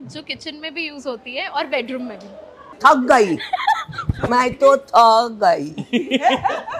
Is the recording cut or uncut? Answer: cut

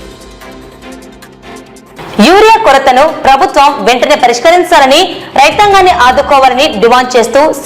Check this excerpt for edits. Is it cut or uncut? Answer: cut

